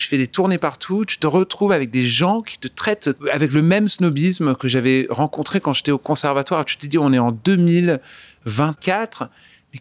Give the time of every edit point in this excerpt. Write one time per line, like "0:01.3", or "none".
0:03.2
0:08.8